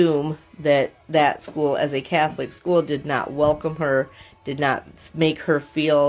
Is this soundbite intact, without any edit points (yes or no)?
yes